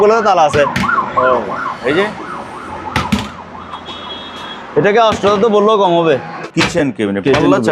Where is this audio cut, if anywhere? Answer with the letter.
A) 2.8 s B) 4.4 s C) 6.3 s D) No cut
C